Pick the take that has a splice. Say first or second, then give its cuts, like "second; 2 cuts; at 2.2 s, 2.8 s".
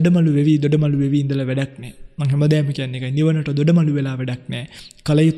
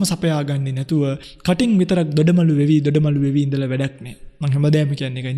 second; 1 cut; at 1.3 s